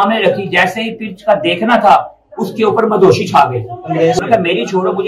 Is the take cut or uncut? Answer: cut